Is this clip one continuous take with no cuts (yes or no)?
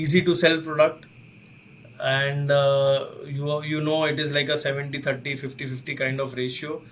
yes